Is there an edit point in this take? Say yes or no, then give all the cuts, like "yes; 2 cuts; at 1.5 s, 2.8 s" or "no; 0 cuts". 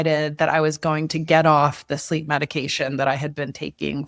no; 0 cuts